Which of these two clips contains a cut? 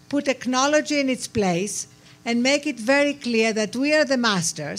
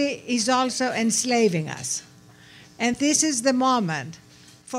second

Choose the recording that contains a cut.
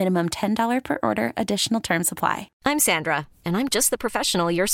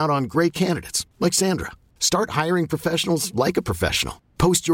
first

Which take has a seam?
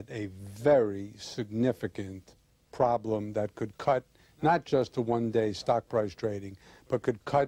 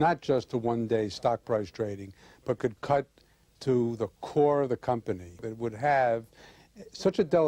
second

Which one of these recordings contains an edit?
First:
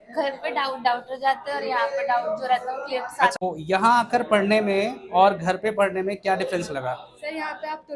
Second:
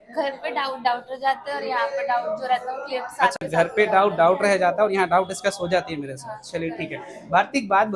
first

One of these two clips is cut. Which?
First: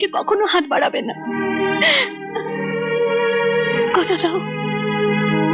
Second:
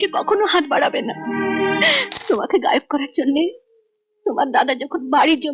second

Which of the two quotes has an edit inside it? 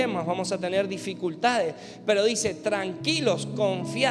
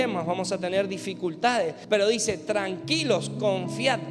second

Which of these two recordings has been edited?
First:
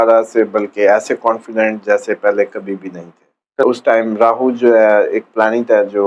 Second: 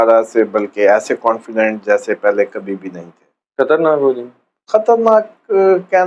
first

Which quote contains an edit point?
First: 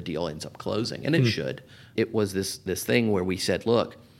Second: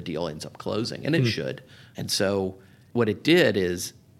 first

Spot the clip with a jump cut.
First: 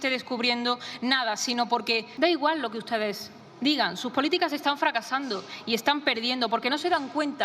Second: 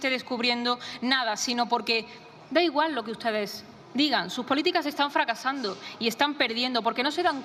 first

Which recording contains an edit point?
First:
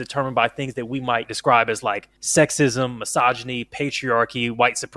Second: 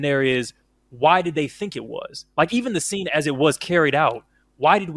first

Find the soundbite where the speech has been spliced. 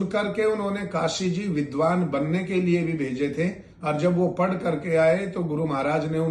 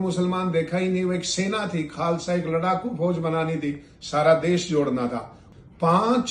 second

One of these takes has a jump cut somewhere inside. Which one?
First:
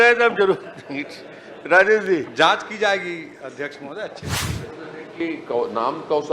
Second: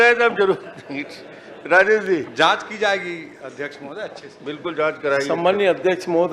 first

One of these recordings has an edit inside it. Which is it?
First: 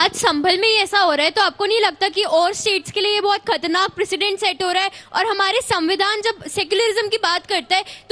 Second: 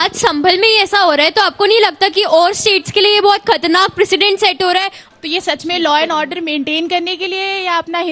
second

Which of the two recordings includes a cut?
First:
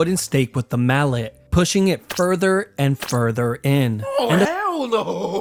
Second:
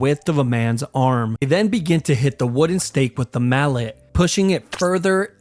second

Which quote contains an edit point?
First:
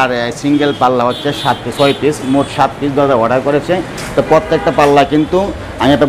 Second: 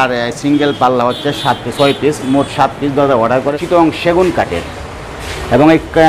second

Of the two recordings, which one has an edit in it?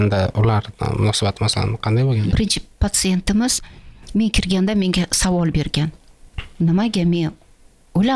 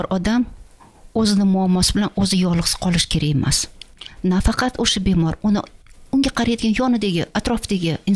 first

